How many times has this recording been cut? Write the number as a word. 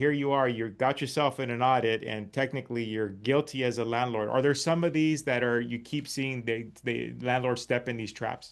zero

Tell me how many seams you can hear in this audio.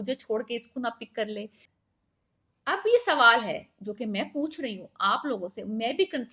one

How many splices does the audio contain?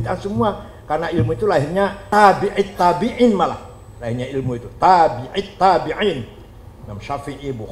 one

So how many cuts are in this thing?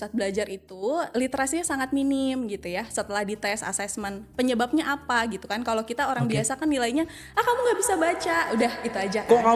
one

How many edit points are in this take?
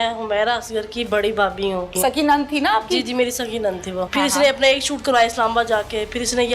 two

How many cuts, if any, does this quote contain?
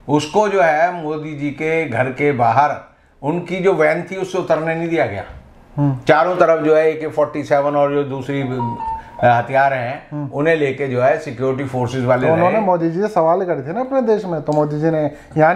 zero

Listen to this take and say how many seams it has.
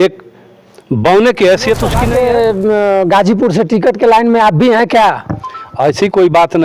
one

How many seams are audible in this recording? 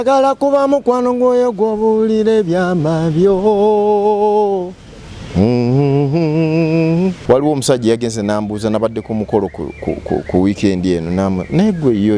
one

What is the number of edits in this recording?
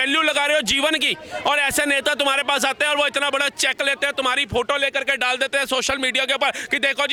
zero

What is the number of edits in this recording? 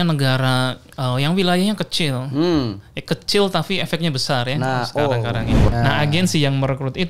one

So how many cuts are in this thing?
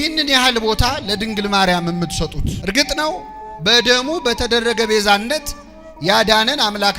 one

